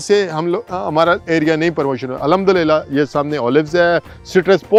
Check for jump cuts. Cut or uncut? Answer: uncut